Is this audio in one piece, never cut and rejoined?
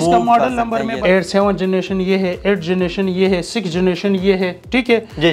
no; 1 cut; at 1.0 s

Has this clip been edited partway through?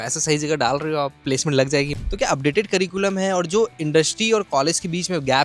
yes; 2 cuts; at 1.2 s, 1.9 s

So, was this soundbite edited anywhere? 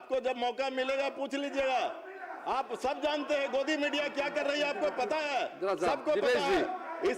no; 0 cuts

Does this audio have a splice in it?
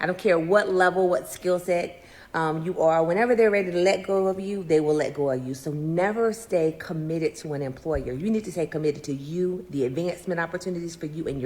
yes; 1 cut; at 6.1 s

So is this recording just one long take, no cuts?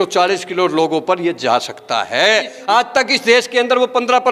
no; 1 cut; at 2.6 s

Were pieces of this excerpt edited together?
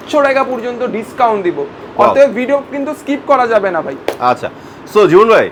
no; 0 cuts

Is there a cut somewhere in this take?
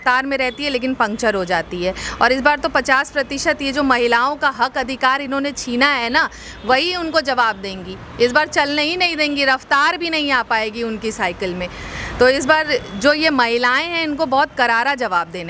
no; 0 cuts

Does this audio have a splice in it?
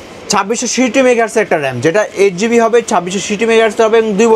no; 0 cuts

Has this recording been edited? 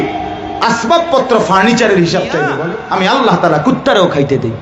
yes; 1 cut; at 2.6 s

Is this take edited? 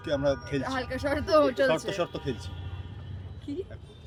no; 0 cuts

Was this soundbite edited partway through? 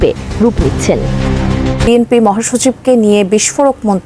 yes; 1 cut; at 1.9 s

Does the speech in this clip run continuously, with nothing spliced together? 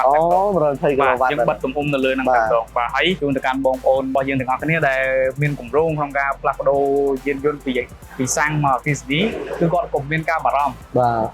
no; 2 cuts; at 3.2 s, 4.1 s

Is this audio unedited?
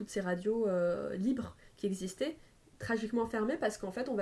no; 1 cut; at 2.6 s

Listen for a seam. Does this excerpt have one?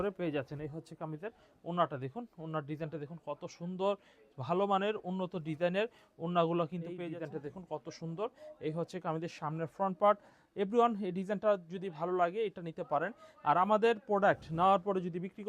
yes; 1 cut; at 7.1 s

